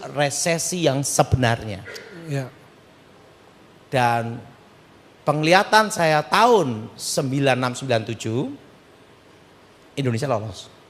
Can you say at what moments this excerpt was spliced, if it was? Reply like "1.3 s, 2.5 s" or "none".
none